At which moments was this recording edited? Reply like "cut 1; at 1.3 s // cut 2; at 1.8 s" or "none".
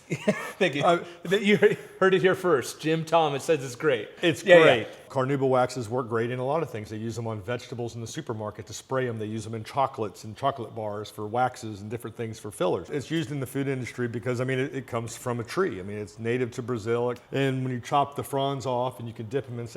cut 1; at 4.1 s // cut 2; at 4.9 s // cut 3; at 12.9 s // cut 4; at 17.2 s